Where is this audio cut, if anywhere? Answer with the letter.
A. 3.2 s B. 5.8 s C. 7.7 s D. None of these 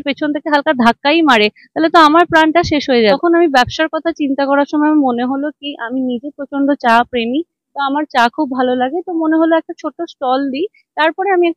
A